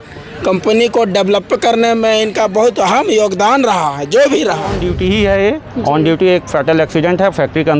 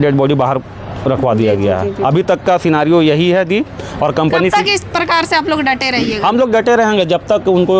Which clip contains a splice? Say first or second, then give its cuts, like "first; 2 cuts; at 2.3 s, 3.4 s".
first; 1 cut; at 4.8 s